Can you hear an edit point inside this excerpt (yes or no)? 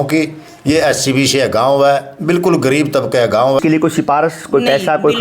yes